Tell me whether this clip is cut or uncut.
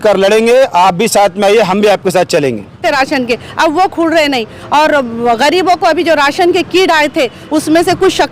cut